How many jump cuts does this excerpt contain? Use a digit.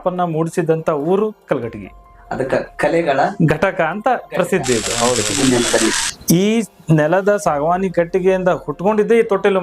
1